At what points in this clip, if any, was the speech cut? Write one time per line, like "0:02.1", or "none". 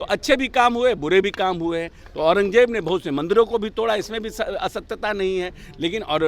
none